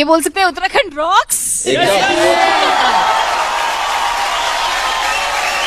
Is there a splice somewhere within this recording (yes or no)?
no